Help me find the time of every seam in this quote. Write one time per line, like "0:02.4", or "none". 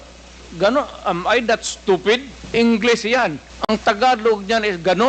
0:02.4
0:03.5

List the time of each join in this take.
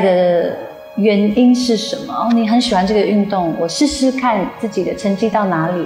0:04.6

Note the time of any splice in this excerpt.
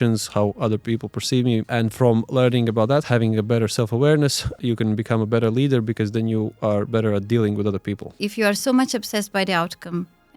0:01.7
0:04.5
0:08.2

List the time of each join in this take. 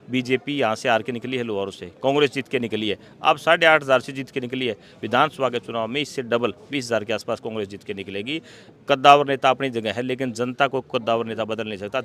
none

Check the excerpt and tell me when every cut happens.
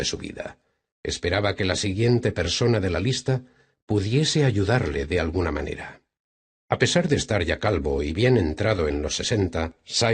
0:08.9

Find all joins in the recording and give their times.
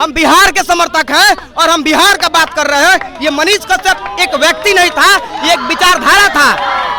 none

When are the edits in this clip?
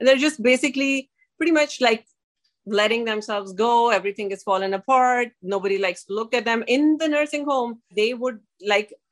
0:07.9

